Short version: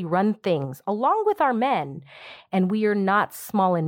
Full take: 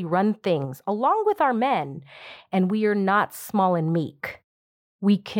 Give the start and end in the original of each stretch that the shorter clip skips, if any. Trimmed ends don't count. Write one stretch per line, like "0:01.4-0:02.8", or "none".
none